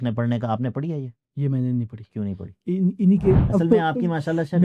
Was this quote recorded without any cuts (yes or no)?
no